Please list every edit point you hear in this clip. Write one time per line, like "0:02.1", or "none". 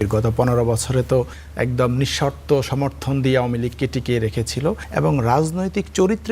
0:01.4
0:04.8

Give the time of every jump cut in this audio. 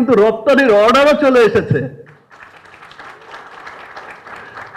none

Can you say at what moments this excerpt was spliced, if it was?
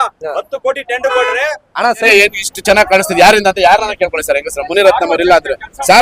0:02.1

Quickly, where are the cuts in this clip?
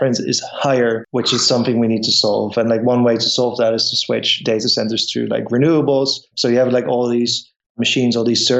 0:01.0
0:06.3

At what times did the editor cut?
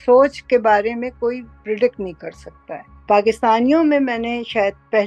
0:03.0

